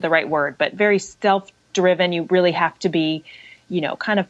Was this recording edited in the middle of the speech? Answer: no; 0 cuts

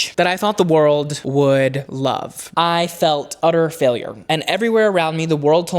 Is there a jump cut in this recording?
yes; 1 cut; at 2.5 s

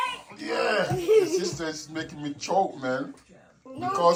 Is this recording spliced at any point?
no; 0 cuts

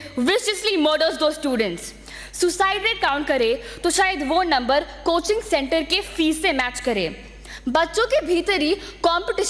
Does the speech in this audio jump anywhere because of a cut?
no; 0 cuts

